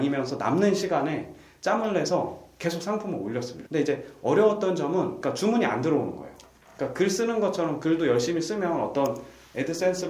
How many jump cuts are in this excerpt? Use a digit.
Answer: 1